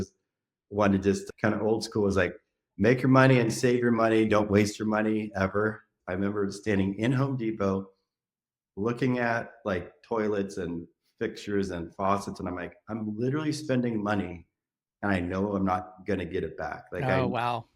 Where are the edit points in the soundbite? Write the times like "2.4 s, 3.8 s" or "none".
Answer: 5.9 s